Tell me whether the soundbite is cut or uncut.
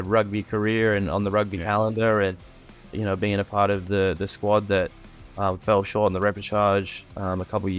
uncut